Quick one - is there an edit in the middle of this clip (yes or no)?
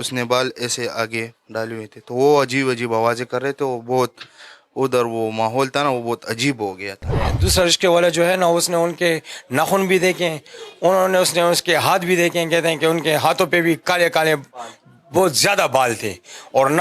yes